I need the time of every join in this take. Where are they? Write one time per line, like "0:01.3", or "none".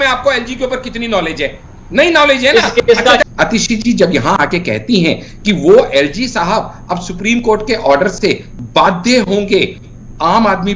0:03.2